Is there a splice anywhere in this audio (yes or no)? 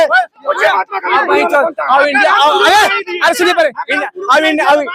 no